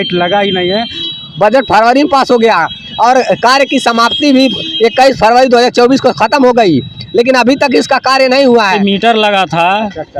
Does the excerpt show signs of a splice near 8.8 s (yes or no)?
yes